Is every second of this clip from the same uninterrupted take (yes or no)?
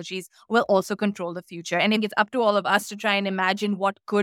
no